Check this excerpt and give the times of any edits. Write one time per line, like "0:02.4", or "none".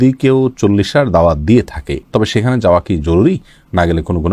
none